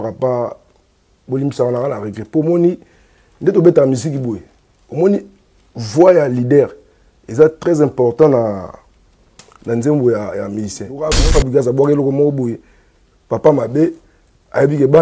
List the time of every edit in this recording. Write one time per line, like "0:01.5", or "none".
0:11.0